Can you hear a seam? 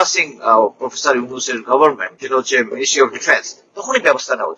yes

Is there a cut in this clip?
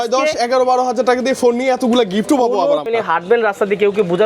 yes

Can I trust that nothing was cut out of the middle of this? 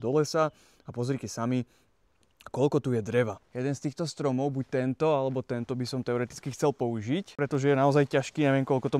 no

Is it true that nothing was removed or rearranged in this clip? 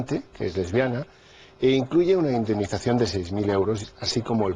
no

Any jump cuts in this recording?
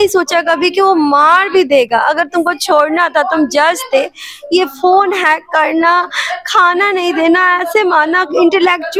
no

